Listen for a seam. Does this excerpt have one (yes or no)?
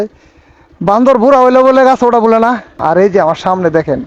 yes